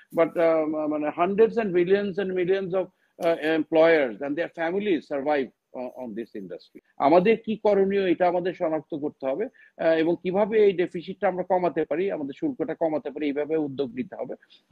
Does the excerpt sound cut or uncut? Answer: cut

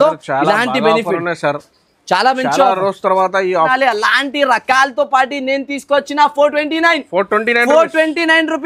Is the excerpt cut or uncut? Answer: cut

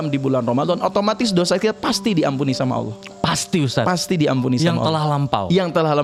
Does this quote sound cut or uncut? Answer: uncut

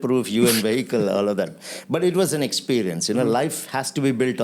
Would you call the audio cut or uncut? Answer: uncut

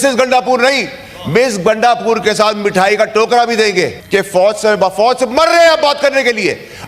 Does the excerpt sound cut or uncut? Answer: cut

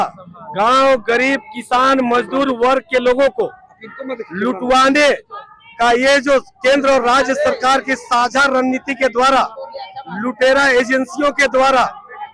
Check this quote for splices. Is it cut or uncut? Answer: uncut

